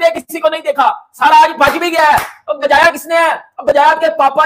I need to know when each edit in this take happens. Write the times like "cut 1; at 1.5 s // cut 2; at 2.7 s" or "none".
none